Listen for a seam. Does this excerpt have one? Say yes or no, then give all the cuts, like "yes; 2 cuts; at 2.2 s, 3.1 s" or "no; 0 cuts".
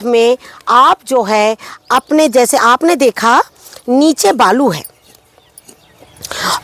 no; 0 cuts